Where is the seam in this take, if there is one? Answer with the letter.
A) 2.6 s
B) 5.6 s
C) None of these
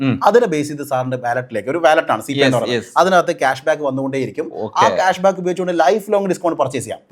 C